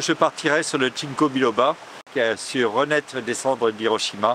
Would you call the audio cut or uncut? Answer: cut